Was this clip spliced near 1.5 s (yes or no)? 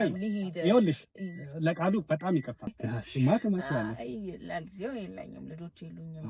no